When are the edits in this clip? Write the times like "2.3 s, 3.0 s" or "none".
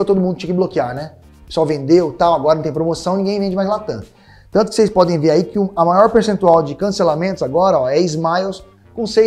none

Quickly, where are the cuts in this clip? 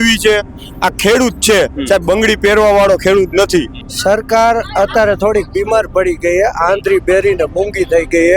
3.8 s

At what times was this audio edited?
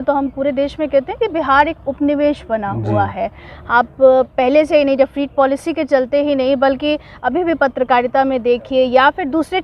none

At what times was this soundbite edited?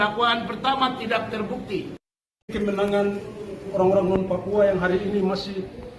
2.5 s

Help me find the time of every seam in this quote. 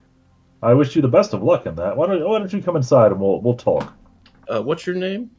4.4 s

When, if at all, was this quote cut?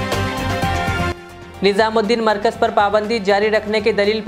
1.1 s

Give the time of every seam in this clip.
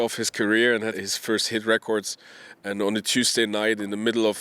0.9 s

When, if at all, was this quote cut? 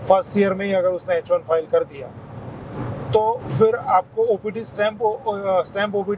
none

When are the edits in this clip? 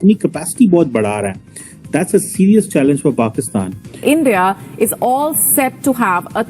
3.9 s

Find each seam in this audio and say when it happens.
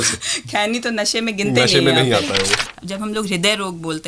2.6 s

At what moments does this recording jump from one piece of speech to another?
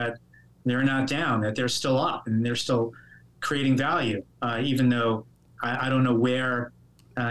5.4 s

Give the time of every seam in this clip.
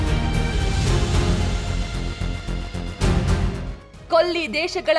3.9 s

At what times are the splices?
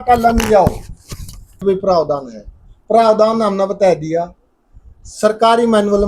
1.6 s

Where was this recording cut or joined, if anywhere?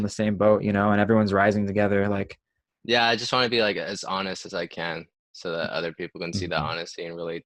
none

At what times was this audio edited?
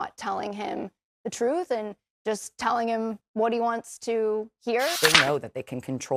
5.0 s

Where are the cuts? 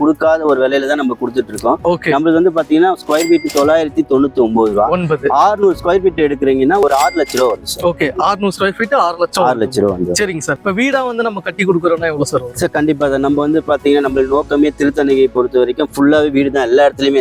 none

